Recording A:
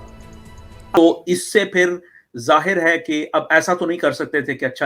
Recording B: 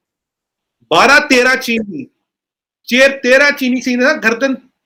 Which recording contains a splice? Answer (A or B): A